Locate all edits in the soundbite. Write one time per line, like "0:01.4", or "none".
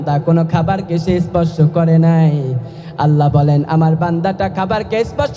none